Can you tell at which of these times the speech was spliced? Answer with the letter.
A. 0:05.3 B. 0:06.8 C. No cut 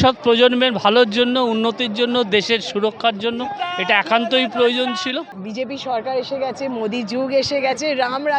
A